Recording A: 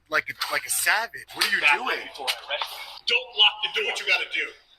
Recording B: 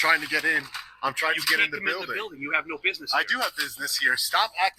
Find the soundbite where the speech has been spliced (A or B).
A